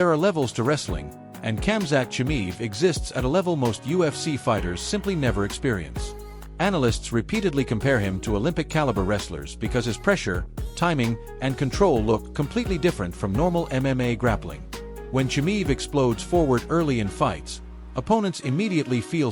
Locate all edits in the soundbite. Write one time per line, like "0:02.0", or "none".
0:05.0